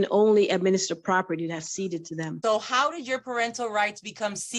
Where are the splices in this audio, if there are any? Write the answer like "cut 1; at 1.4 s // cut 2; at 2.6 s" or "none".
cut 1; at 2.3 s